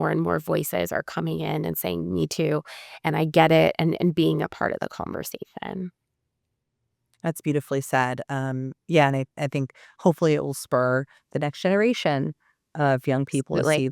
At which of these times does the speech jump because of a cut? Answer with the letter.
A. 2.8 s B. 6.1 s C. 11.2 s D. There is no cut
D